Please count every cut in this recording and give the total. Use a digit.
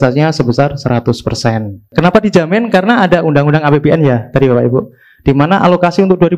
1